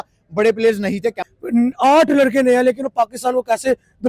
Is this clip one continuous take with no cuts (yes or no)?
no